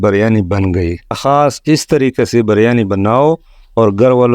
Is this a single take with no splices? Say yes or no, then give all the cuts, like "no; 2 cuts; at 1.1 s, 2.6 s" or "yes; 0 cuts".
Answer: no; 1 cut; at 1.2 s